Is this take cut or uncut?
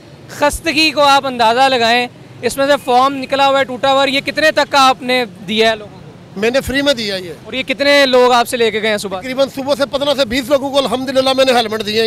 uncut